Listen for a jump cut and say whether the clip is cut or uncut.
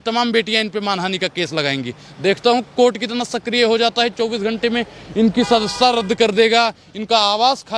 uncut